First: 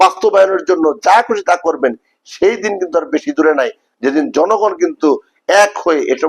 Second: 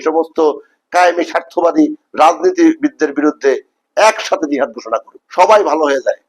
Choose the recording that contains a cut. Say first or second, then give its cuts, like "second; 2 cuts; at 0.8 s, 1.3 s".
second; 1 cut; at 5.2 s